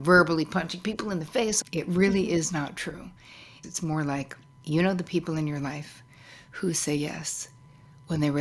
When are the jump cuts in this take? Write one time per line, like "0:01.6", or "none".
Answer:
0:01.6
0:03.5